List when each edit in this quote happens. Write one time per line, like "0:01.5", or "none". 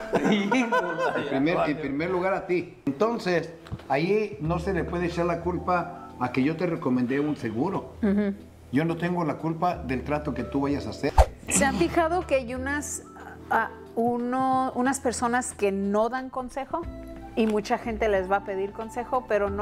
0:02.9
0:11.1